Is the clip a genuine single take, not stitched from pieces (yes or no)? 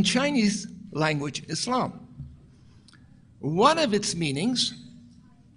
no